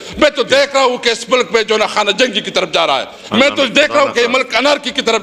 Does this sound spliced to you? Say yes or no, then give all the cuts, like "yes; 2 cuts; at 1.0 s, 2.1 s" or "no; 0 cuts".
no; 0 cuts